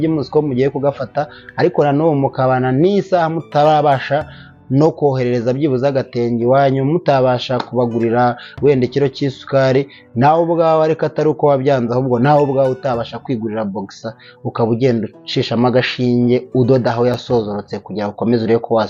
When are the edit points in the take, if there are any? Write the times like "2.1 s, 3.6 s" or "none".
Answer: none

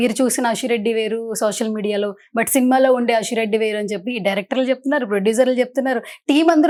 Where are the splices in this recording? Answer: none

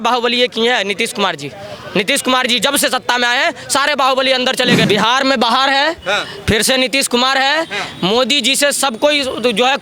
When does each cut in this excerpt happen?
4.9 s

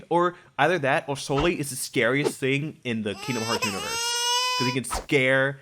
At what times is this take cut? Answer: none

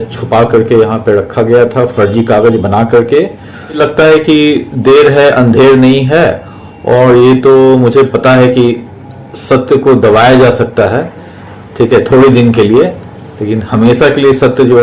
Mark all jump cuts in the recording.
none

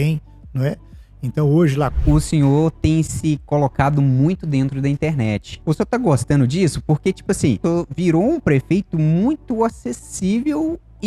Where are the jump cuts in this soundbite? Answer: 1.9 s, 5.5 s, 7.6 s

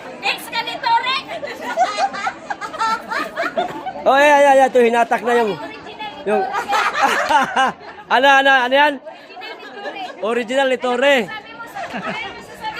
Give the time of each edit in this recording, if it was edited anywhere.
3.8 s, 11.7 s

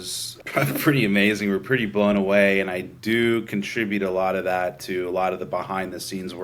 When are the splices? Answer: none

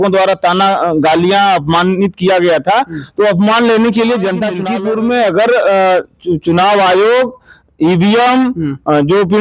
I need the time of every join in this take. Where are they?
4.6 s

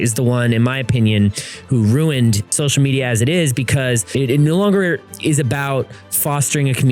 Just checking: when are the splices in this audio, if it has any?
2.5 s, 4.1 s

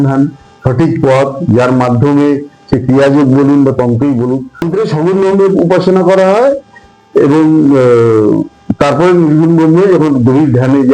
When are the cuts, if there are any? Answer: 4.7 s

